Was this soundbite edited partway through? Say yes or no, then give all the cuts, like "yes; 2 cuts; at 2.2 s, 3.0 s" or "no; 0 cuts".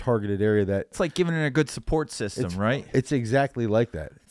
yes; 2 cuts; at 1.0 s, 2.8 s